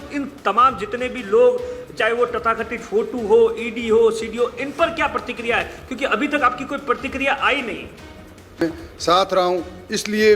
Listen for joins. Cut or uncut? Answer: cut